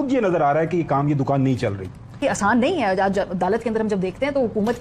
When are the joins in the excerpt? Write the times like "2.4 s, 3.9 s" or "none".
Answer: 2.2 s